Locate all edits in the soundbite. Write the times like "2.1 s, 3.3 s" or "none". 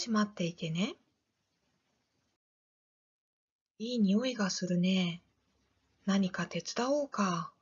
6.6 s